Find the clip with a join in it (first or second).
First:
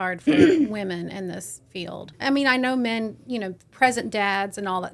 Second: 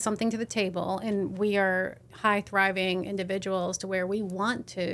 first